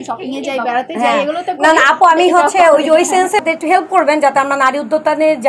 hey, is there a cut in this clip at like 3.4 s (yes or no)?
yes